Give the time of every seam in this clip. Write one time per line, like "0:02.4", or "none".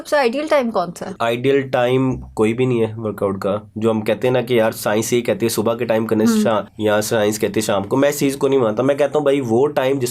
0:01.0
0:06.7